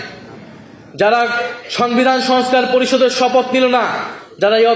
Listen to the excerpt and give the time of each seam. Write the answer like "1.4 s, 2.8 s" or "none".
none